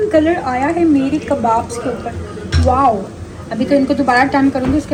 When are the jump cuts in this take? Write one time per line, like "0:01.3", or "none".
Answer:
none